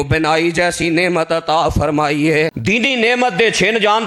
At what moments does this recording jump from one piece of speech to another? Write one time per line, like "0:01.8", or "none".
0:02.6